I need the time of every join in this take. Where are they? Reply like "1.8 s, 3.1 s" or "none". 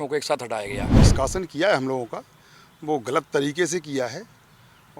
1.0 s